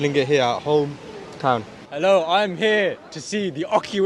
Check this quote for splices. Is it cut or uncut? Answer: cut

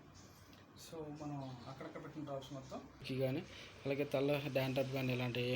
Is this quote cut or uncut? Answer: cut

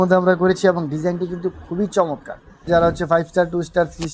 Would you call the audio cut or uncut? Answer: cut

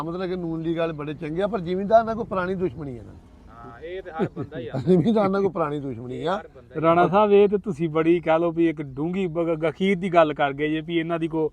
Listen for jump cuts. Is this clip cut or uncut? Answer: uncut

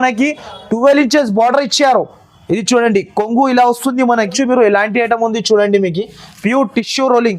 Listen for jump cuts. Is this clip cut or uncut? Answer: cut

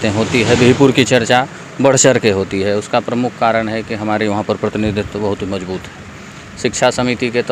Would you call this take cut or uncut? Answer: uncut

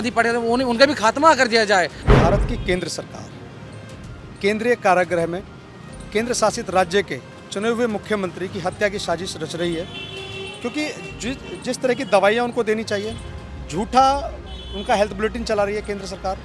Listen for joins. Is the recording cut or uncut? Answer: cut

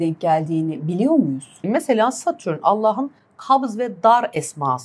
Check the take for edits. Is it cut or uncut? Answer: cut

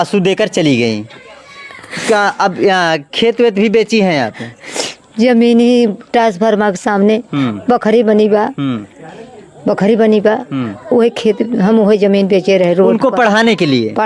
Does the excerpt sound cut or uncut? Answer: uncut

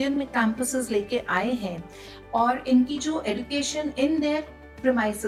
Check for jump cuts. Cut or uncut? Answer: uncut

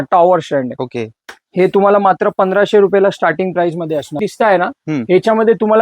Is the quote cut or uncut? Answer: cut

